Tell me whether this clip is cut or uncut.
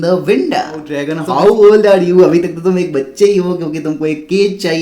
cut